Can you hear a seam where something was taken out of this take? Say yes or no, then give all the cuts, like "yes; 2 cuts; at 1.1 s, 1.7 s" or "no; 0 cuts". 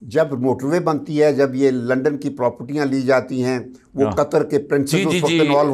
no; 0 cuts